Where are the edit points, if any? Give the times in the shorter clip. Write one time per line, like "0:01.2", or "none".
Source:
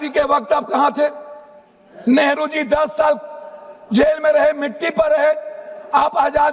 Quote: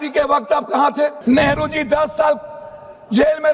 0:01.2